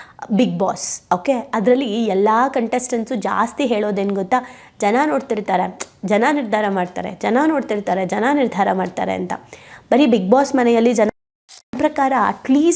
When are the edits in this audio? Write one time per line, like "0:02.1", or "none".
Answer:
0:11.7